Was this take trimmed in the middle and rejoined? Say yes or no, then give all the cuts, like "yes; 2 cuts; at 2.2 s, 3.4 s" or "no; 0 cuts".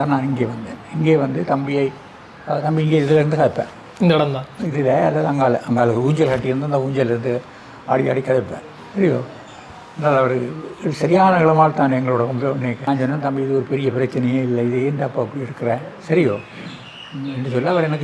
yes; 1 cut; at 12.8 s